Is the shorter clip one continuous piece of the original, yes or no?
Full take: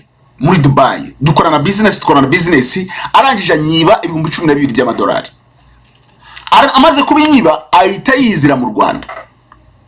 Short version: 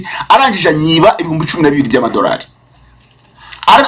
yes